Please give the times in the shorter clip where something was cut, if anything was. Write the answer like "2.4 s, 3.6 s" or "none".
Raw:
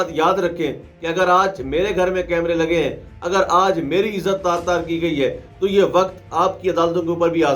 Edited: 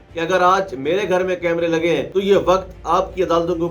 2.1 s

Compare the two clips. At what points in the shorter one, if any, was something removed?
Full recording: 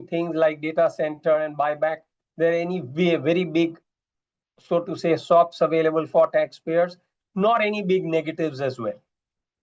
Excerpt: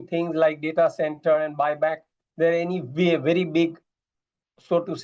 none

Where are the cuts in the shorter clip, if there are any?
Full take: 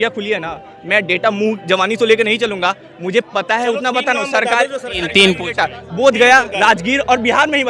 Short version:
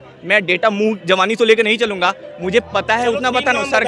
none

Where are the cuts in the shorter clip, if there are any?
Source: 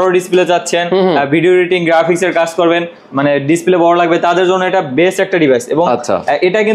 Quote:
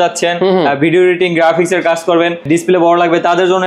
2.4 s

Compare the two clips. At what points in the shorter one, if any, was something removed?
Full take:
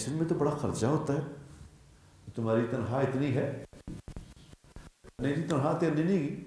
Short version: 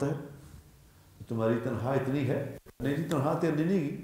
2.6 s

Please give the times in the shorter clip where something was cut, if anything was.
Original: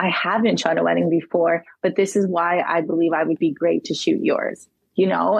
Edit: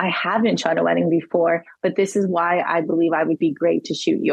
none

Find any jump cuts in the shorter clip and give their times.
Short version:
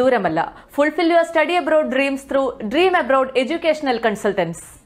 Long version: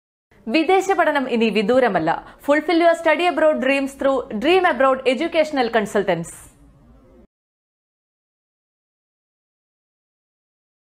none

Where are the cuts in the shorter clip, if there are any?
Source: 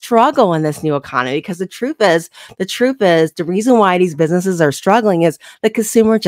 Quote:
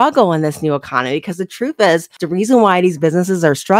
2.2 s

